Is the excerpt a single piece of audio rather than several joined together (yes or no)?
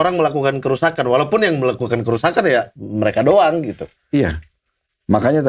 yes